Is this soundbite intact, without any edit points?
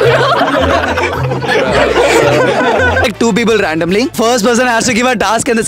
no; 2 cuts; at 3.0 s, 4.2 s

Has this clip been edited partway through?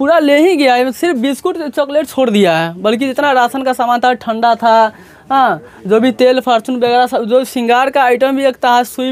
no; 0 cuts

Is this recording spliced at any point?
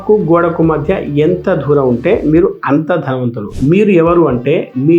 yes; 1 cut; at 3.5 s

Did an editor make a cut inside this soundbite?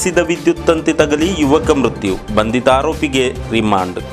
no; 0 cuts

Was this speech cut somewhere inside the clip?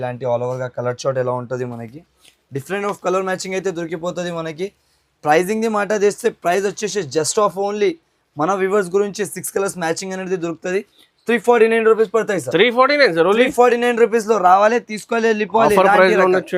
no; 0 cuts

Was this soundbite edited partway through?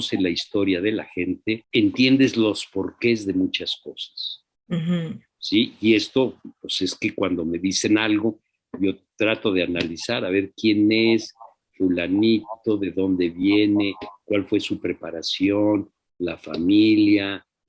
yes; 1 cut; at 1.6 s

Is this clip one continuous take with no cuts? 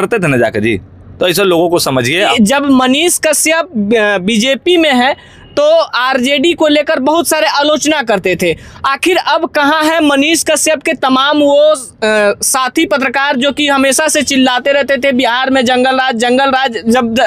no; 1 cut; at 2.3 s

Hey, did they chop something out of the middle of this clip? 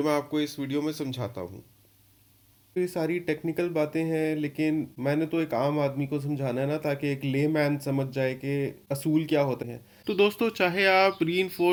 no; 0 cuts

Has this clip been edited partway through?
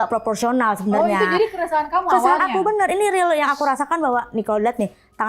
no; 0 cuts

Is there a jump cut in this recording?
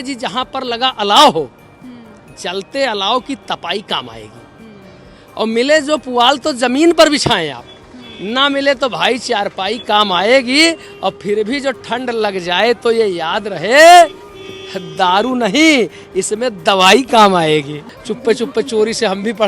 yes; 1 cut; at 17.9 s

